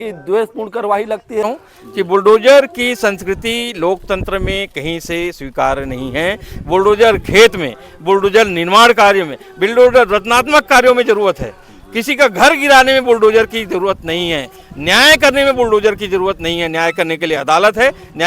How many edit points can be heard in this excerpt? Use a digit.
1